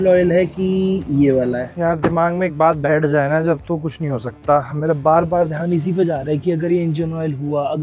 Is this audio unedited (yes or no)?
no